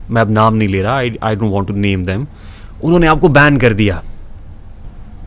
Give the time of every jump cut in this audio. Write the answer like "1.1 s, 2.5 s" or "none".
none